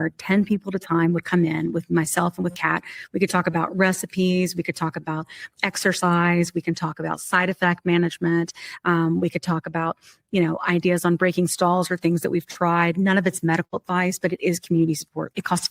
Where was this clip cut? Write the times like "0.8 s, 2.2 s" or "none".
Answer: none